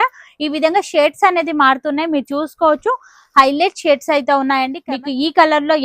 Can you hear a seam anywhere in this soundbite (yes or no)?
yes